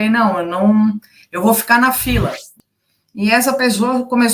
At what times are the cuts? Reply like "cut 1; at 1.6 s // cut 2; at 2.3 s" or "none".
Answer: cut 1; at 2.6 s